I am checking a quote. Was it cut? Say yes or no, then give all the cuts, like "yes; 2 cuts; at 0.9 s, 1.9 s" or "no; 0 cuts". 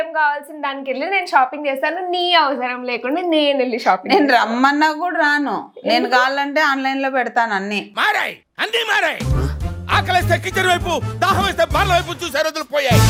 no; 0 cuts